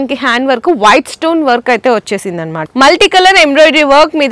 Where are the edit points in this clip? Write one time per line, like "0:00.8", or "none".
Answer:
0:02.6